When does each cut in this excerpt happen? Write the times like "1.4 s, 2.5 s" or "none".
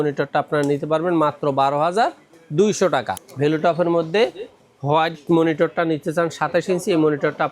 3.2 s